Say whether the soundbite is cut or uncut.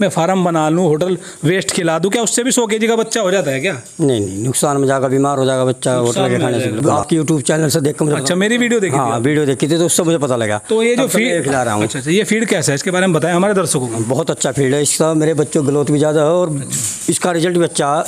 cut